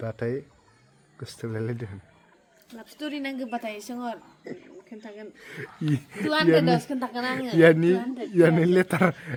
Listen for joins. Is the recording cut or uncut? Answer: uncut